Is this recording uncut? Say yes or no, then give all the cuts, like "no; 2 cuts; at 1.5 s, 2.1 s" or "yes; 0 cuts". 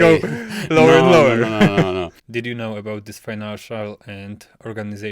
no; 1 cut; at 2.2 s